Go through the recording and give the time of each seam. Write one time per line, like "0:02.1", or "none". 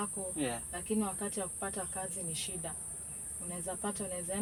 none